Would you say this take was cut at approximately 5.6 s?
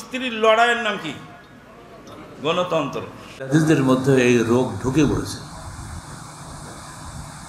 no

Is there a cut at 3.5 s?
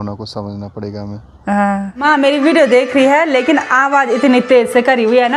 no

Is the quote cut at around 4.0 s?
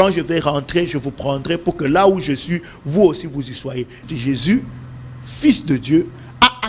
yes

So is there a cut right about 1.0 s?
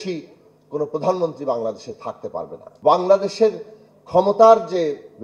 no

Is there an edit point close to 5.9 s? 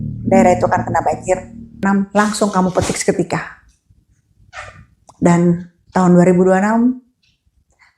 no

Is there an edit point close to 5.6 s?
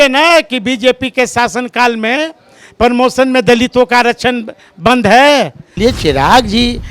yes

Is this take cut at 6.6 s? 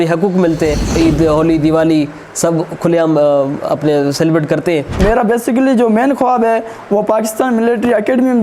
no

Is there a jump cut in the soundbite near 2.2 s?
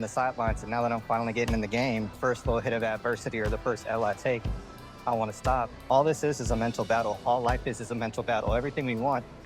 yes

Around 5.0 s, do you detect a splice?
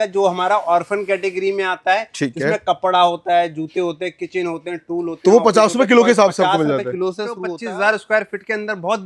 no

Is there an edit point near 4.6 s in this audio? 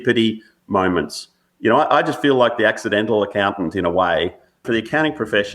yes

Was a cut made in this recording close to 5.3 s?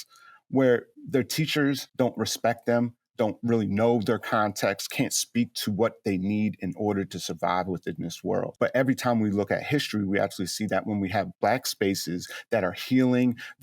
no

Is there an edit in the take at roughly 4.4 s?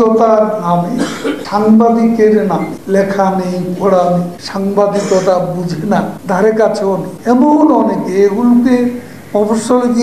yes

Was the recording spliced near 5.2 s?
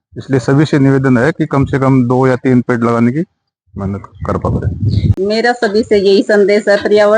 yes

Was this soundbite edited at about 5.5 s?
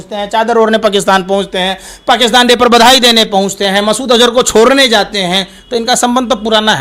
no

